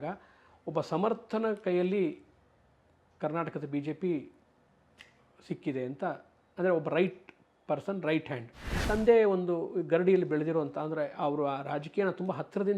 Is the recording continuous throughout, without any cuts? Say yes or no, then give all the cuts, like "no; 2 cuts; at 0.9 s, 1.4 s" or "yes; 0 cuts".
no; 1 cut; at 8.7 s